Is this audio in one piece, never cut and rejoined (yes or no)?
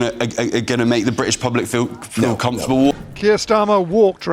no